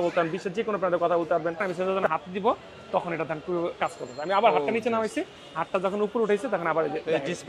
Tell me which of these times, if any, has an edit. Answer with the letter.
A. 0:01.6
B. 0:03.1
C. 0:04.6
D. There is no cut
A